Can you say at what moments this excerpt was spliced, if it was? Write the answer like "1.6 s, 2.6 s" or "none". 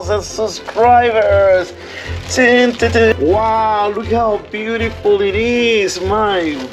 3.1 s